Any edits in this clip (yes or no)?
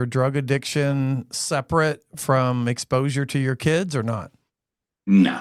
no